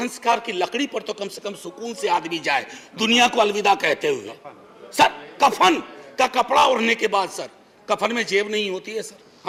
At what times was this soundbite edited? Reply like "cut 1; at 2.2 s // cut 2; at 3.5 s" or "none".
none

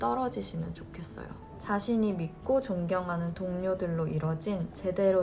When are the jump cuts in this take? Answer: cut 1; at 1.5 s

